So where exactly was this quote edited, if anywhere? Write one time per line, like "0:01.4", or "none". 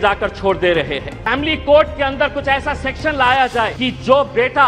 0:01.2
0:03.7

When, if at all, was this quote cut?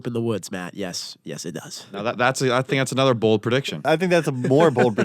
0:01.8
0:03.9

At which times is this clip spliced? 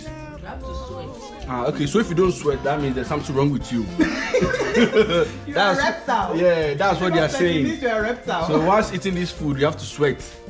none

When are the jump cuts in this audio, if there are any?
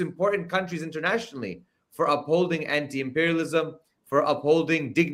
none

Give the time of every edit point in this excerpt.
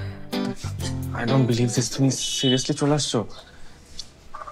0:01.1

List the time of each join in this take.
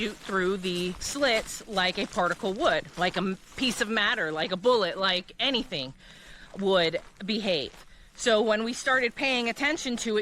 0:01.0
0:02.9

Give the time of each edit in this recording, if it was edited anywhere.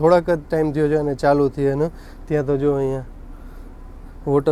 none

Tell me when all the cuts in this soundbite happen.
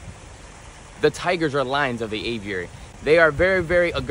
none

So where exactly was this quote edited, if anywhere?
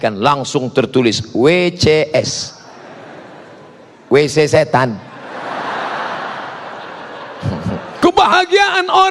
0:07.9

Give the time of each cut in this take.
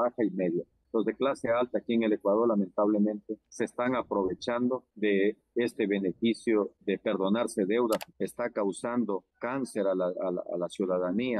0:08.1

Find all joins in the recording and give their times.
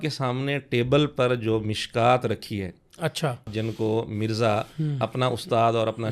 0:03.5

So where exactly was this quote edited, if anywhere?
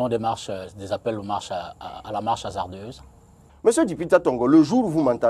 0:03.3

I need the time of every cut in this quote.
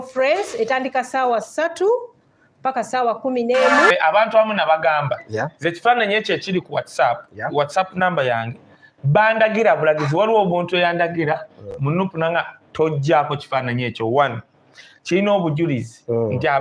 0:03.9

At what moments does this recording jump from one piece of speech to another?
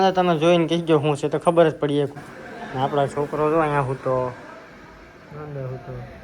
0:02.1

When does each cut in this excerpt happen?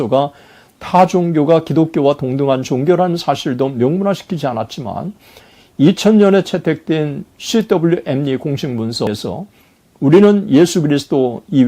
0:09.1

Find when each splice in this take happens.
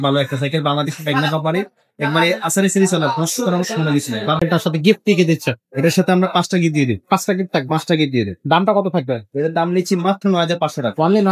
0:04.4

